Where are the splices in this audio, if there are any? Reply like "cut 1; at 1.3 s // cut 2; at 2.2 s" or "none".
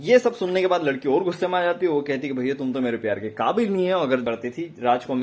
cut 1; at 4.2 s